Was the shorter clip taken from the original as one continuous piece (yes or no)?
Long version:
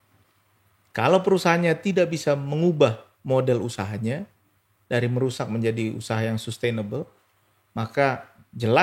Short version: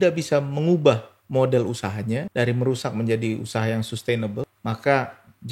no